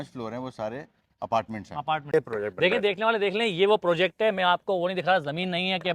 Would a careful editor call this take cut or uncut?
cut